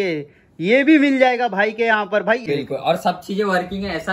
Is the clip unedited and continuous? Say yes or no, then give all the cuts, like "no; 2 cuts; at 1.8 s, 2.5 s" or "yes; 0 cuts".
no; 1 cut; at 2.4 s